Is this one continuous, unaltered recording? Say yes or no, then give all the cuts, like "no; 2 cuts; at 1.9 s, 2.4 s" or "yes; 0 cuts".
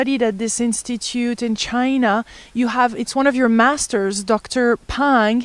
no; 1 cut; at 2.9 s